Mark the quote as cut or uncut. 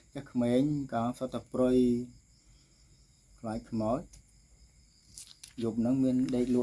uncut